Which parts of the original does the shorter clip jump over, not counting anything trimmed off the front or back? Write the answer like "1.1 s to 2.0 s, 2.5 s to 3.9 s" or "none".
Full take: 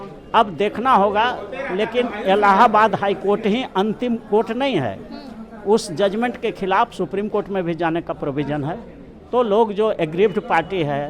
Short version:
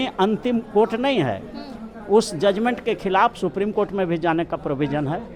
none